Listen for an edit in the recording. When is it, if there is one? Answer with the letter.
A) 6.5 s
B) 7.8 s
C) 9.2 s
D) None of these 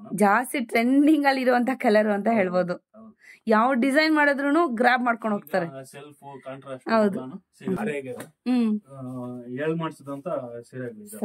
B